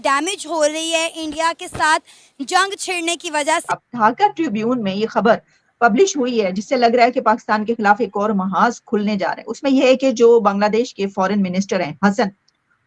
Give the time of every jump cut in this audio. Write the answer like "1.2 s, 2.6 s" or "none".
3.9 s